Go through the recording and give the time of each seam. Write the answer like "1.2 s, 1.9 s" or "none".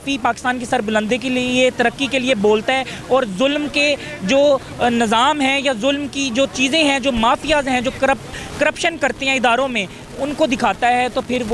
none